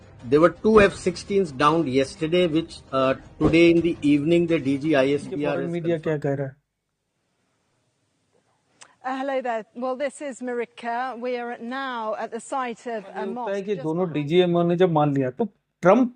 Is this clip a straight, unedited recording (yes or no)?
no